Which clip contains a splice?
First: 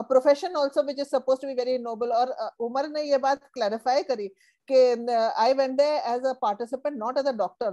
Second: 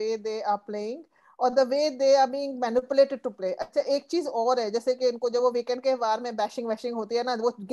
second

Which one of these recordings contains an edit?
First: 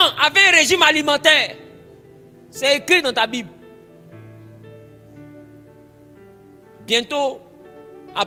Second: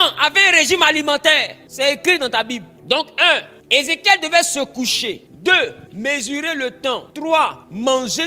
second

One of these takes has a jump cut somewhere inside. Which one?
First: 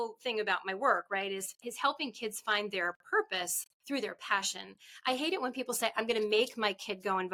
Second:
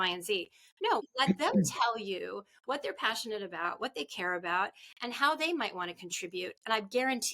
second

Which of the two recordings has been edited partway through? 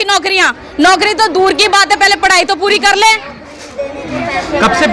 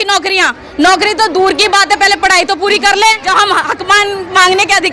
second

